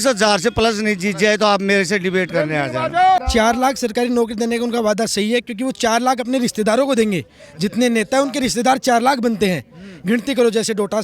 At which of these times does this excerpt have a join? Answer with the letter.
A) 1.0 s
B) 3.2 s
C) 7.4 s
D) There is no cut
B